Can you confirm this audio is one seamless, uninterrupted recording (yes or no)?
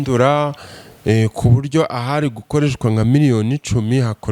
yes